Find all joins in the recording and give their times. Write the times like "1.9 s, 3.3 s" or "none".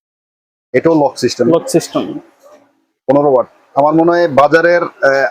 none